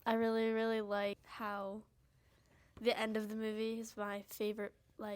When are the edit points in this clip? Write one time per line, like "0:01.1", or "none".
0:01.3